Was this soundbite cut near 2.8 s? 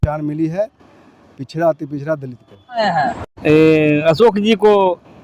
yes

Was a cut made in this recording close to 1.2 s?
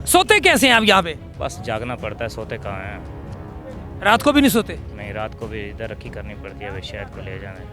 no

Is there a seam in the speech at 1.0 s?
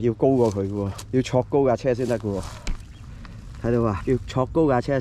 yes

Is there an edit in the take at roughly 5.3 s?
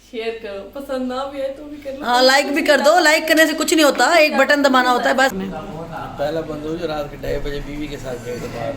yes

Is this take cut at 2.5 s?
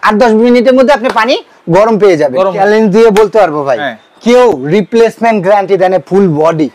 yes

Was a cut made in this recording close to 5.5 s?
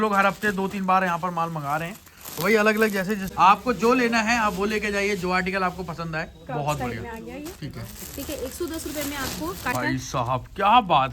no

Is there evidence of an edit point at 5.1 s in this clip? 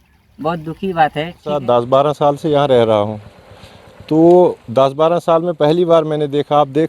no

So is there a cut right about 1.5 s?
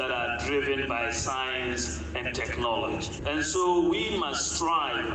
no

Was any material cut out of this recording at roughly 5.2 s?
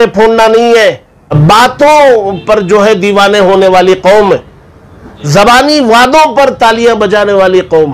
no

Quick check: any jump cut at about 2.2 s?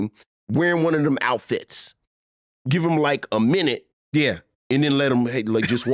no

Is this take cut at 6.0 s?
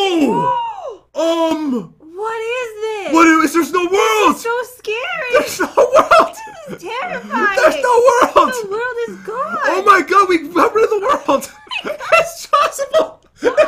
no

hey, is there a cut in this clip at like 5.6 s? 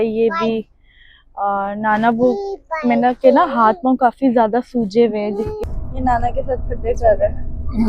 yes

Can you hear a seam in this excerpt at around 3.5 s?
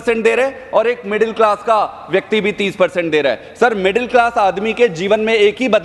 no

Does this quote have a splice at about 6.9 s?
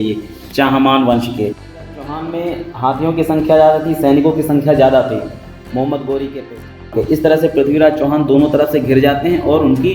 yes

